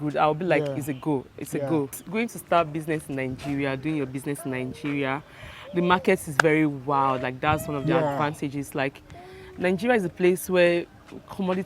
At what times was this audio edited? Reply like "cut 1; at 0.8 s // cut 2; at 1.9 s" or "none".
cut 1; at 2.0 s